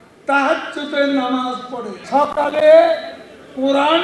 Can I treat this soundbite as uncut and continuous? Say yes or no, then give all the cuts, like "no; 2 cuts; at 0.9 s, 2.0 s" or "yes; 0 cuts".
no; 1 cut; at 2.0 s